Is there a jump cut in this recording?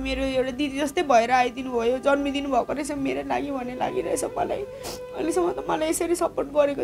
no; 0 cuts

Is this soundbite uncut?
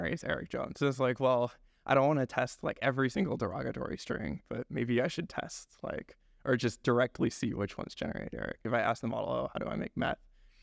no; 1 cut; at 8.6 s

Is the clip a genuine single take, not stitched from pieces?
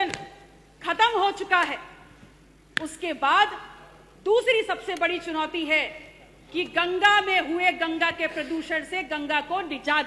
yes; 0 cuts

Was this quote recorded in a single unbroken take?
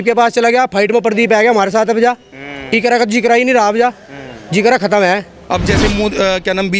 no; 1 cut; at 5.3 s

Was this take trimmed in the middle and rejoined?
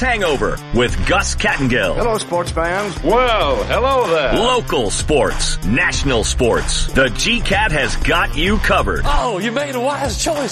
no; 0 cuts

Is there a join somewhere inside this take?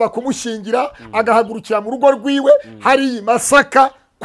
no; 0 cuts

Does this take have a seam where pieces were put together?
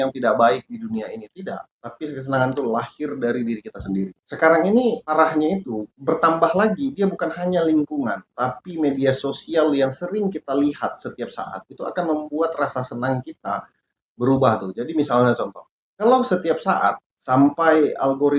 no; 0 cuts

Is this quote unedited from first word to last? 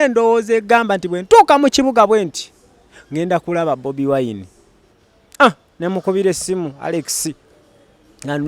no; 1 cut; at 4.9 s

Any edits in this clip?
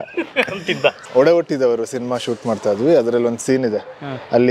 yes; 1 cut; at 1.0 s

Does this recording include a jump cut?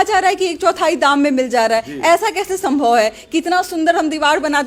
no; 0 cuts

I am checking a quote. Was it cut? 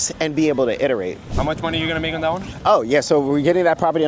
yes; 1 cut; at 1.2 s

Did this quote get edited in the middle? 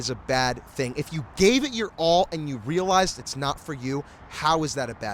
no; 0 cuts

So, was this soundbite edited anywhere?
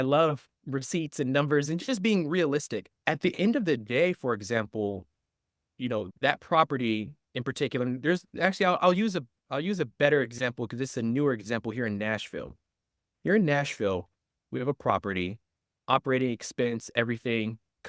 yes; 1 cut; at 3.0 s

